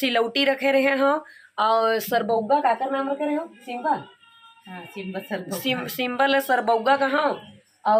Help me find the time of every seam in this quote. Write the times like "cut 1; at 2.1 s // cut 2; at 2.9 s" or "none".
none

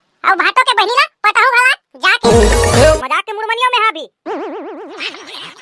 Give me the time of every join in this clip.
cut 1; at 3.0 s

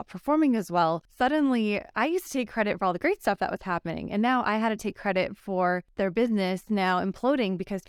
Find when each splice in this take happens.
cut 1; at 1.1 s // cut 2; at 5.9 s

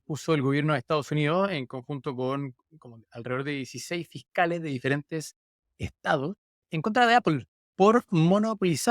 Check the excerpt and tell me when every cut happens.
cut 1; at 6.6 s

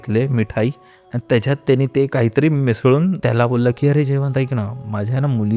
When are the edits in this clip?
cut 1; at 3.2 s

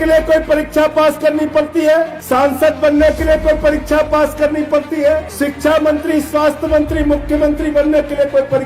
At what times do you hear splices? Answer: cut 1; at 2.2 s // cut 2; at 5.3 s

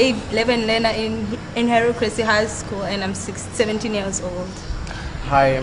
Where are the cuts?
cut 1; at 1.9 s

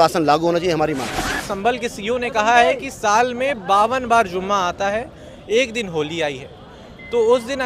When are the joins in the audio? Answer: cut 1; at 1.4 s

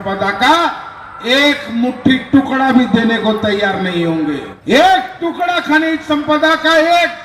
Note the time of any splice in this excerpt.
cut 1; at 4.5 s

